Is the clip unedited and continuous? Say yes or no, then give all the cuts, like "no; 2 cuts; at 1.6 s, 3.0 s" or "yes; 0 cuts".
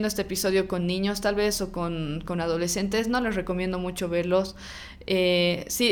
yes; 0 cuts